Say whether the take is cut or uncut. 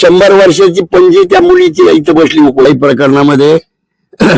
cut